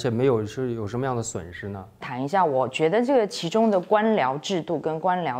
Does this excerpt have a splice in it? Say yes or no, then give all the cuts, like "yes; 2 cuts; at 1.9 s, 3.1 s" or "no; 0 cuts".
yes; 1 cut; at 2.1 s